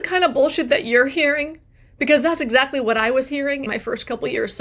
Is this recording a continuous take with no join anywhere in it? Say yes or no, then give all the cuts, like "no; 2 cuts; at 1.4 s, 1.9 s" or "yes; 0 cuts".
no; 1 cut; at 3.7 s